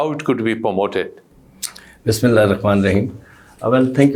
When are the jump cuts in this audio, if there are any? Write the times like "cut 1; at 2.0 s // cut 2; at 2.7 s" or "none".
none